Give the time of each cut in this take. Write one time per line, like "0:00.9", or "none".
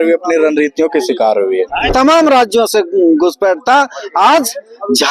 0:01.8